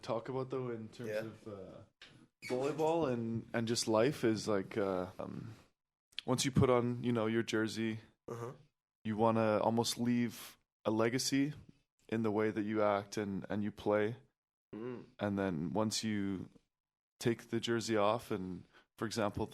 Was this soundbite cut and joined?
yes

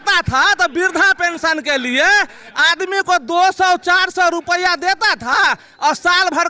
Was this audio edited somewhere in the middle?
no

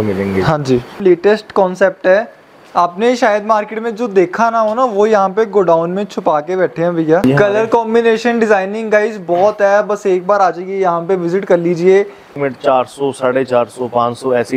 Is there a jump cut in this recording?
yes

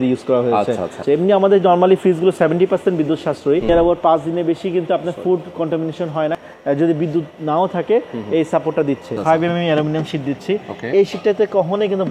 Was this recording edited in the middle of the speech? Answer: yes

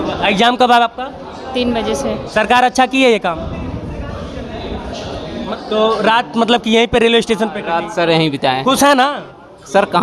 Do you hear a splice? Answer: yes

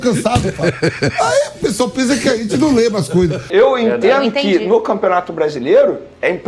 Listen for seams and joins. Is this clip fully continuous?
no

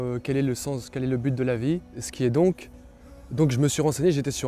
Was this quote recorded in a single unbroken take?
no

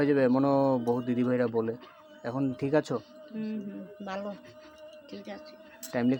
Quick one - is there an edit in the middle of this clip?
no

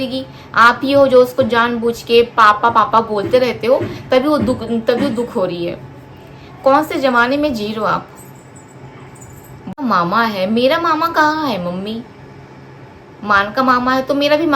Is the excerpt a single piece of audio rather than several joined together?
no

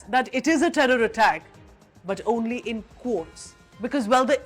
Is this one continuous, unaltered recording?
yes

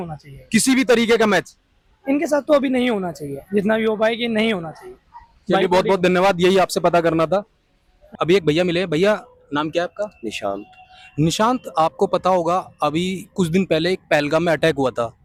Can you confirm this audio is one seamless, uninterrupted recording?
yes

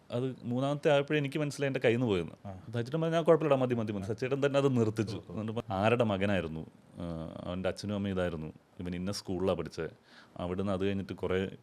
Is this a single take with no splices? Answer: no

